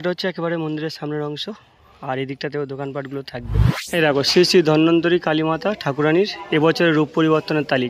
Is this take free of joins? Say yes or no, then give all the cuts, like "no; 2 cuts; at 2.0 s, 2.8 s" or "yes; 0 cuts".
no; 1 cut; at 3.7 s